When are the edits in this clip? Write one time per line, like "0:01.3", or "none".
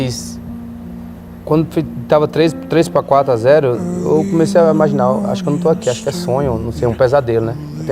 none